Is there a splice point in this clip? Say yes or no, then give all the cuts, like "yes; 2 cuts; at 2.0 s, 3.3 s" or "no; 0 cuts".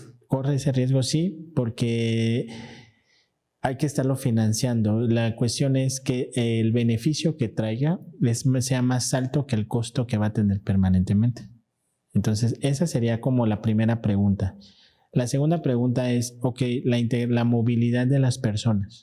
no; 0 cuts